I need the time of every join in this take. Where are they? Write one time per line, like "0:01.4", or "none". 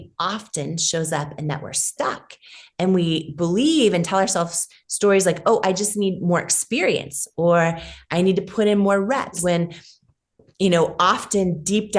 0:09.4